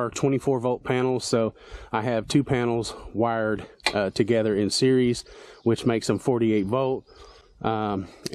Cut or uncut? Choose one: uncut